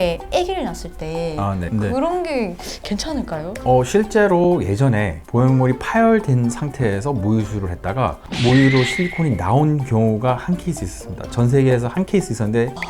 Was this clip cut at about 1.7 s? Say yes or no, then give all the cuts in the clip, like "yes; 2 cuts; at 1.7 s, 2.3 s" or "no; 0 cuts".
yes; 1 cut; at 1.7 s